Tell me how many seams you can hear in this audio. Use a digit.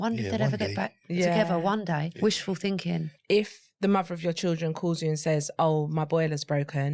2